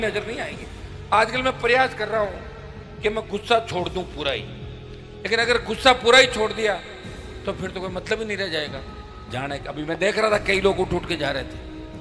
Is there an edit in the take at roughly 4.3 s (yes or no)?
no